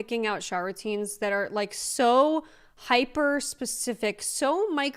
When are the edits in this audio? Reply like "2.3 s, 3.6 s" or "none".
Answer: none